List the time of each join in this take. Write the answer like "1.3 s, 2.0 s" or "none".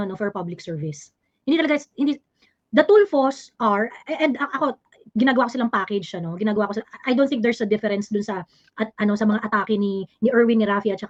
none